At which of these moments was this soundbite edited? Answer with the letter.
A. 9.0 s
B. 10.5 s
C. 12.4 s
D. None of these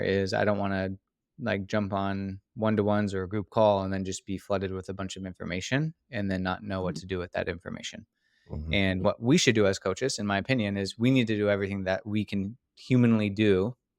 A